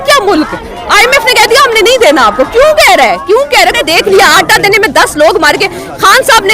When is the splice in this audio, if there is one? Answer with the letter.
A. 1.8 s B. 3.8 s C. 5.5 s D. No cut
B